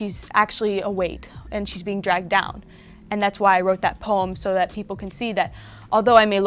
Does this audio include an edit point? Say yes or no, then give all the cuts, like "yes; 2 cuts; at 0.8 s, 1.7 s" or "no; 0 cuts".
no; 0 cuts